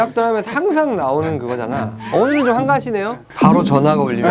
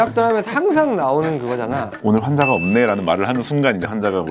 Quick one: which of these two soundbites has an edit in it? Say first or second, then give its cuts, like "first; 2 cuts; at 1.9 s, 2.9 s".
second; 1 cut; at 2.0 s